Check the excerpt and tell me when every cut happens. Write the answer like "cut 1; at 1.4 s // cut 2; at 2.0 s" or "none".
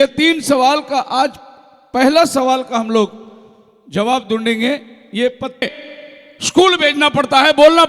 cut 1; at 5.7 s